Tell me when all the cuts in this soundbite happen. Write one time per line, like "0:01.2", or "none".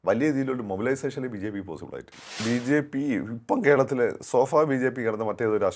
0:02.2